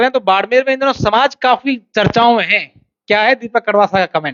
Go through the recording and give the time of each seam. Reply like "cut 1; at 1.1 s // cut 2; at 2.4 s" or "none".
none

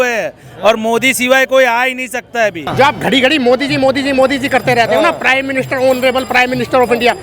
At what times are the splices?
cut 1; at 2.7 s

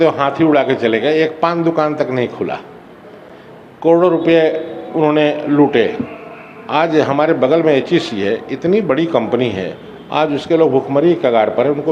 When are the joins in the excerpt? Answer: none

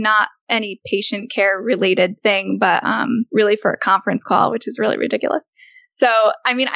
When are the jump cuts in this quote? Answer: cut 1; at 2.2 s // cut 2; at 3.3 s

